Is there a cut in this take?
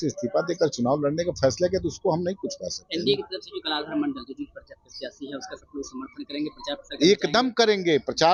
no; 0 cuts

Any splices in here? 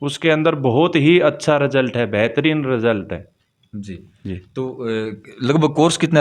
no; 0 cuts

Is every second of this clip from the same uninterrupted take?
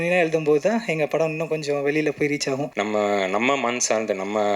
no; 1 cut; at 2.7 s

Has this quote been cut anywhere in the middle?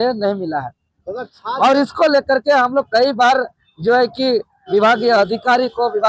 no; 0 cuts

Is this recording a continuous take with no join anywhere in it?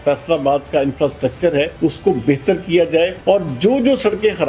no; 2 cuts; at 1.7 s, 3.2 s

